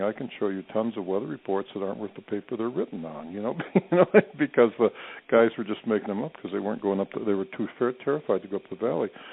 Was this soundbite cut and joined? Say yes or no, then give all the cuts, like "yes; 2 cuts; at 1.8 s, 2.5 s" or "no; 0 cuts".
no; 0 cuts